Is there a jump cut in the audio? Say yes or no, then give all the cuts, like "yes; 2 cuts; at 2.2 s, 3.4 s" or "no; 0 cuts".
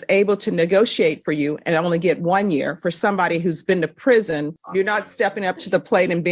yes; 1 cut; at 4.6 s